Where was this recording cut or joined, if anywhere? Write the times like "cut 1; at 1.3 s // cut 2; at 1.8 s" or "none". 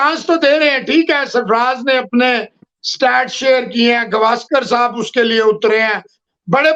none